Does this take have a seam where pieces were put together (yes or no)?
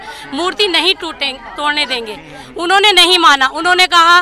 no